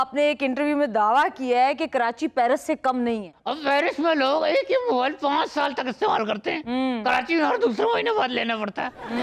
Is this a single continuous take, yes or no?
no